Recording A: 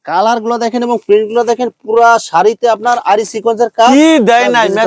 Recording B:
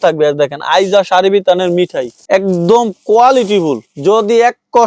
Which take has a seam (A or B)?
B